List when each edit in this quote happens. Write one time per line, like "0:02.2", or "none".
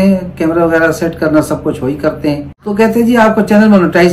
0:02.6